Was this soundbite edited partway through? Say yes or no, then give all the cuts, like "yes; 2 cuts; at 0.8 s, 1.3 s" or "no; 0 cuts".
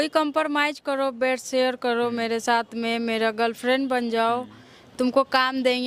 no; 0 cuts